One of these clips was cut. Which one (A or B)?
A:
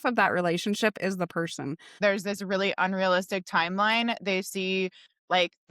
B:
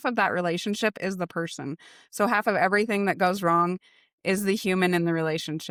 A